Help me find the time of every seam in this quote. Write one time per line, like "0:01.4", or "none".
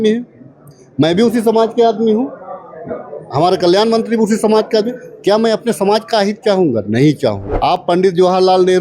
0:07.5